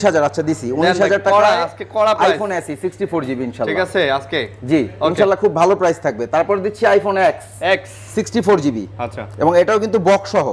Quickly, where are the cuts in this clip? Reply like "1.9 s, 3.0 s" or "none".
none

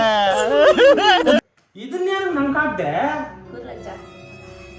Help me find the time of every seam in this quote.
1.4 s

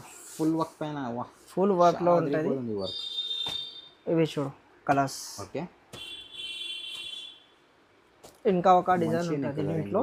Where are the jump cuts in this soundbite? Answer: none

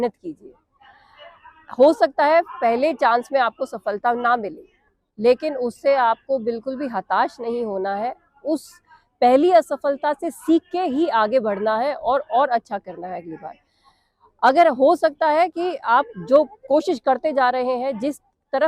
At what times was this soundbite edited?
none

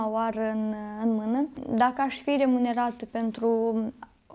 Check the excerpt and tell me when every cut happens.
1.6 s

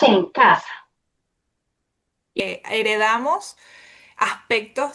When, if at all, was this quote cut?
2.4 s

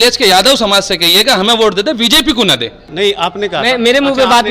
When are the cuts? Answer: 2.8 s

